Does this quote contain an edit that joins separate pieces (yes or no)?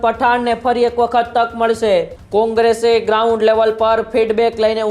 yes